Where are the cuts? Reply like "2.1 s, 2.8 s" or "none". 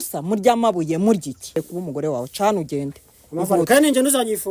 1.6 s